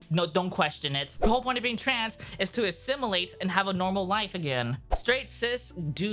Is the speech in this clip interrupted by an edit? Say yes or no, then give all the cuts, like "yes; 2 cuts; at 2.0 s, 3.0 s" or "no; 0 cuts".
yes; 2 cuts; at 1.1 s, 4.9 s